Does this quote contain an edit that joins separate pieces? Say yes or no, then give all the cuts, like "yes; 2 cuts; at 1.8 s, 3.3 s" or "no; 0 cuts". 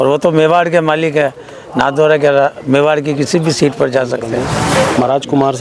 yes; 1 cut; at 4.6 s